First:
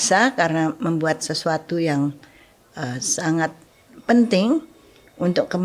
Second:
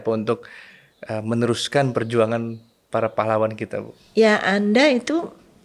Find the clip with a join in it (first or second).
second